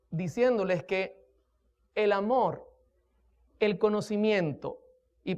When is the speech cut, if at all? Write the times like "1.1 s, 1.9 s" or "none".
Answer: none